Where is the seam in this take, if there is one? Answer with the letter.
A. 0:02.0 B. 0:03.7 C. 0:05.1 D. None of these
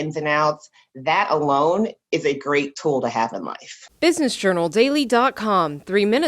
B